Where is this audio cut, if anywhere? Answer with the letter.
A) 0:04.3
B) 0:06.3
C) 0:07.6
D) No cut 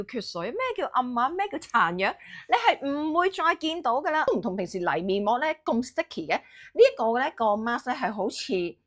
A